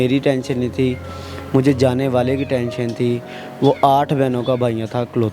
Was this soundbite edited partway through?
no; 0 cuts

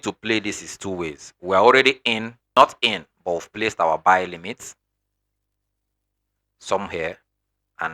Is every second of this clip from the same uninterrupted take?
no; 1 cut; at 2.4 s

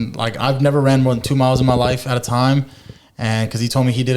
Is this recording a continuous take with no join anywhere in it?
yes; 0 cuts

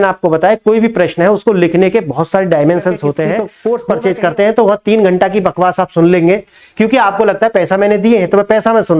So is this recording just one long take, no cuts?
no; 1 cut; at 3.5 s

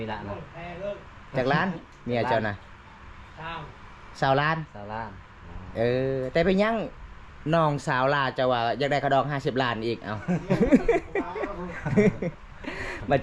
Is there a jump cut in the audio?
no; 0 cuts

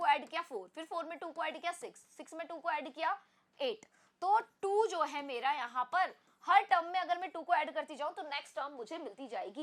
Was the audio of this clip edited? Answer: no; 0 cuts

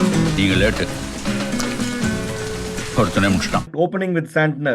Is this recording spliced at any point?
yes; 1 cut; at 3.7 s

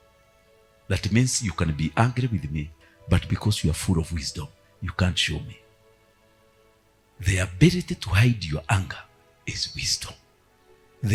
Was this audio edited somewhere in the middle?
no; 0 cuts

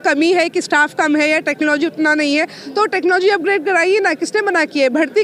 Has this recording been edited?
no; 0 cuts

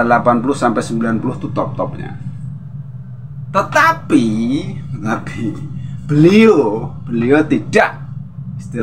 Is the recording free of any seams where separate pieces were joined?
yes; 0 cuts

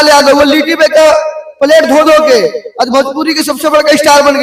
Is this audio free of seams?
yes; 0 cuts

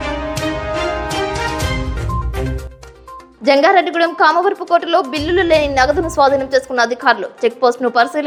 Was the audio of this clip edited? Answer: no; 0 cuts

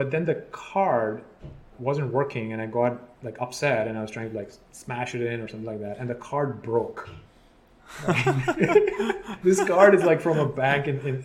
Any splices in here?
yes; 2 cuts; at 1.7 s, 9.3 s

